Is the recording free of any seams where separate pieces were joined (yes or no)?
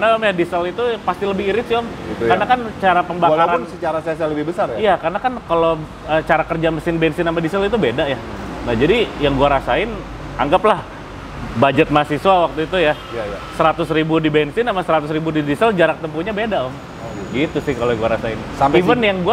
yes